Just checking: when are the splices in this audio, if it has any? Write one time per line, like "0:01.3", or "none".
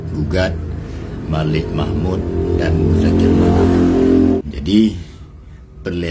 0:04.4